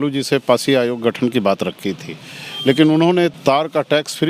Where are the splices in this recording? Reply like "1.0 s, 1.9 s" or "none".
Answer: 3.3 s